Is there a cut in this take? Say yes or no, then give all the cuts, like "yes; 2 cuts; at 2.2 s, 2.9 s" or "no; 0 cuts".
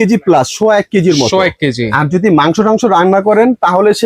no; 0 cuts